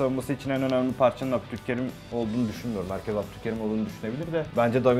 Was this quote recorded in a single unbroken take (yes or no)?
yes